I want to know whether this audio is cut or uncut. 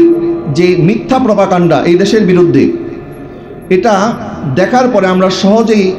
uncut